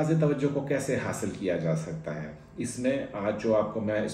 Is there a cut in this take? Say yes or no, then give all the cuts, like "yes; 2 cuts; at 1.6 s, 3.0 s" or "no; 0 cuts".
no; 0 cuts